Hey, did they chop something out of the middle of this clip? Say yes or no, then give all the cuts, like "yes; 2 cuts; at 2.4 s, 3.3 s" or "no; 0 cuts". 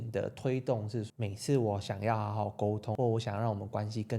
yes; 2 cuts; at 1.1 s, 2.9 s